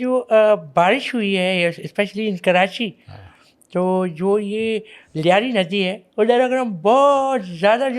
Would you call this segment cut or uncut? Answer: uncut